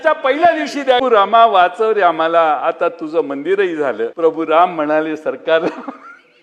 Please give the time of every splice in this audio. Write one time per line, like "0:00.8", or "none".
0:01.0
0:04.1